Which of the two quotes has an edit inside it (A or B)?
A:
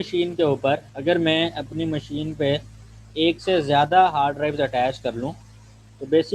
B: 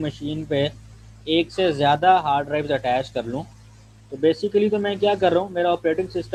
A